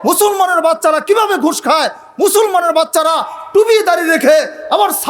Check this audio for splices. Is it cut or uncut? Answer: uncut